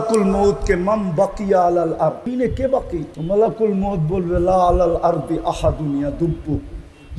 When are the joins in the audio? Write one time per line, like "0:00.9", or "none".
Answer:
0:02.3
0:03.1